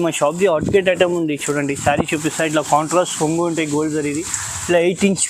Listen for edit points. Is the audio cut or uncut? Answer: uncut